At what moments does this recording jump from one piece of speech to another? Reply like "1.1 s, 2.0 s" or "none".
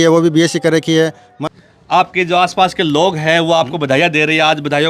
1.4 s

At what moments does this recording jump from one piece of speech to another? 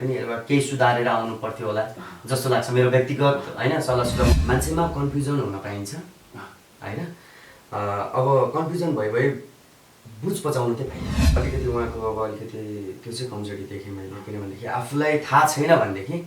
4.3 s, 11.4 s

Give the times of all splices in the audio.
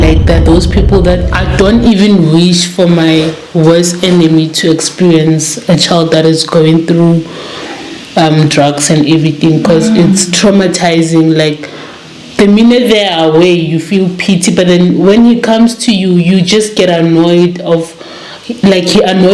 1.3 s

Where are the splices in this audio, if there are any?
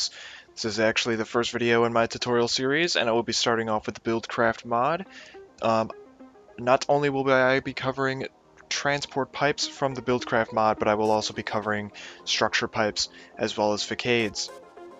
none

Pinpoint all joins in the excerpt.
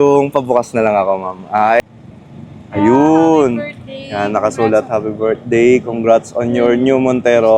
1.8 s

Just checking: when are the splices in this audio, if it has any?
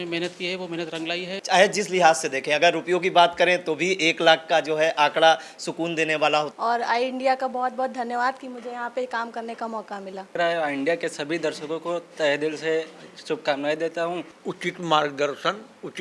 1.3 s, 6.5 s, 10.3 s, 14.3 s

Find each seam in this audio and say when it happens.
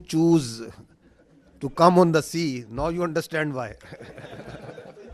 none

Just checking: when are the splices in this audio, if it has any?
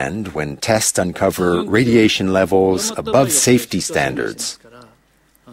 4.3 s

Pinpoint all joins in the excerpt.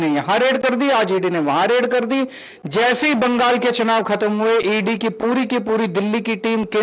none

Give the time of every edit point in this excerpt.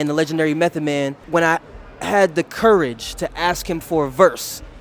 1.2 s

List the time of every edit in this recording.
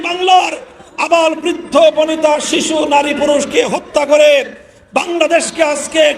none

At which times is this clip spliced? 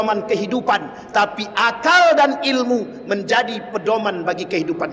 none

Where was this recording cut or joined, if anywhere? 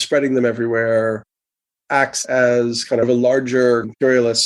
none

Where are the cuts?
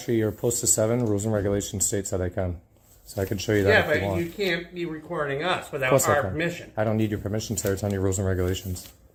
none

